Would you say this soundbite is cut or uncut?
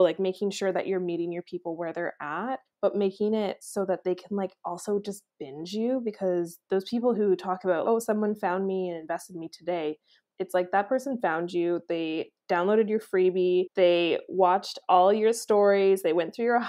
cut